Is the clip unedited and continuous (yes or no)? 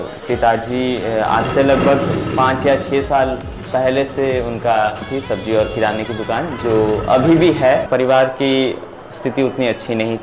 no